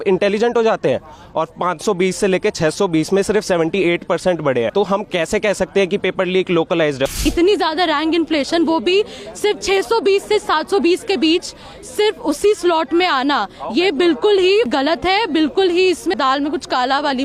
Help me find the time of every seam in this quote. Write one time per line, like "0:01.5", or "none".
0:04.7
0:07.2
0:14.7
0:16.1